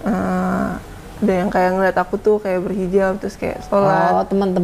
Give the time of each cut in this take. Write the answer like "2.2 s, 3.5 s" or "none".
none